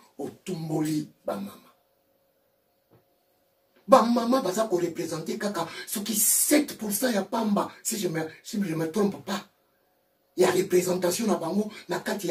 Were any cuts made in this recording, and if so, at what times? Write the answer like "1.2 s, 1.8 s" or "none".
2.7 s